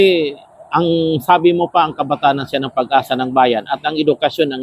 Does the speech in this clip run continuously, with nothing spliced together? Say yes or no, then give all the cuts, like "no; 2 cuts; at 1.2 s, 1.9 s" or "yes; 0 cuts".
yes; 0 cuts